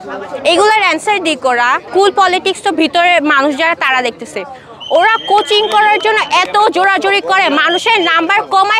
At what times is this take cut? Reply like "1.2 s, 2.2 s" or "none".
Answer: 1.8 s